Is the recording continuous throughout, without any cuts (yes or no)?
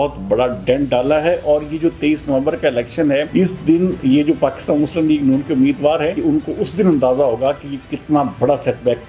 no